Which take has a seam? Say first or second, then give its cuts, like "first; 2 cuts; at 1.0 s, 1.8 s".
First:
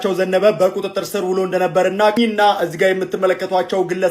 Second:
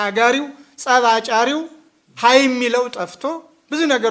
first; 1 cut; at 2.2 s